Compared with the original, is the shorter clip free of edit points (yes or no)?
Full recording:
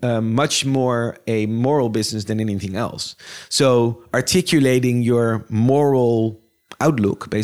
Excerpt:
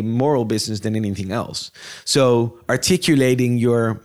yes